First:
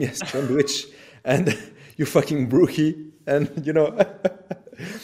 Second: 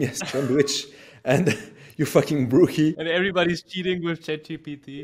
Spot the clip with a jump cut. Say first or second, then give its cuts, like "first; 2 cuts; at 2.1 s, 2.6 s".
second; 1 cut; at 3.2 s